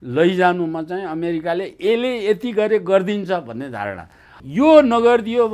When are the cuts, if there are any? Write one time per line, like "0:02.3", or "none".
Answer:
0:04.4